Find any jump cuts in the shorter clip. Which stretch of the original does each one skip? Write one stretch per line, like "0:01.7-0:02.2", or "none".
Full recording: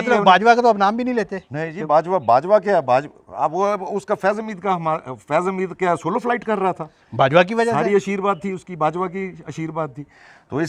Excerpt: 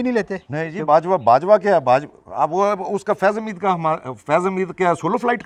none